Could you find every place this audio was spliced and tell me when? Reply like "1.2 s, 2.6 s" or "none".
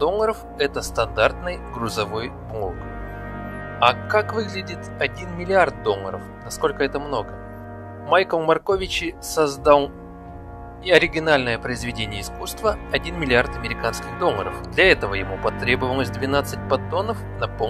5.1 s